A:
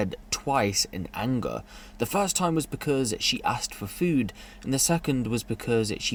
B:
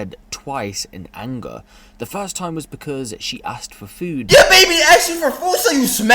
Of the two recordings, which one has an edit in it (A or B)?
B